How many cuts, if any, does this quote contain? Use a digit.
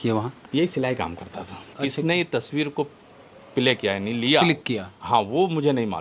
1